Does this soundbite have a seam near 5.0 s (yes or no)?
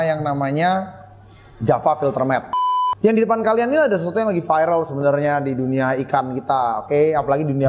no